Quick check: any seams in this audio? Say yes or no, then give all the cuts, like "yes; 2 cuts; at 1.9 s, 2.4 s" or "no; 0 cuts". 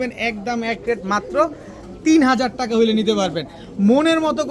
no; 0 cuts